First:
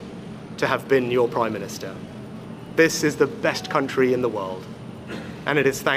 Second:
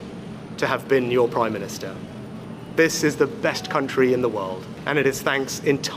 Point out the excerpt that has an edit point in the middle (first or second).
second